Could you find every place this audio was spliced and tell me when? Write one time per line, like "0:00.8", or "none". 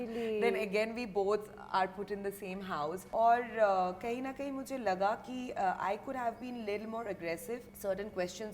0:03.0
0:07.7